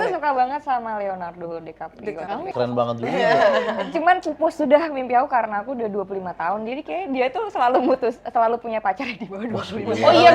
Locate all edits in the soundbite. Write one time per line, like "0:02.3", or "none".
0:02.5